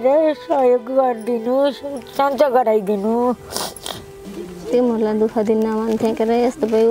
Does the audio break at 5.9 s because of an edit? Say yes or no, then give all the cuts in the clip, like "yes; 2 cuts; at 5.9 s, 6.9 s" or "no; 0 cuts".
no; 1 cut; at 4.2 s